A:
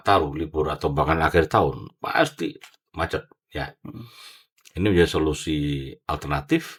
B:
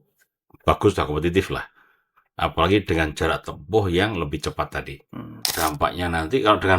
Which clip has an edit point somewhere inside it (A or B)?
B